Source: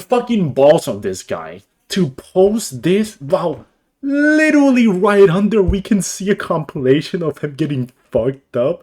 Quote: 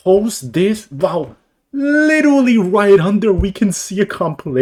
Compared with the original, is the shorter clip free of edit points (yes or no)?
yes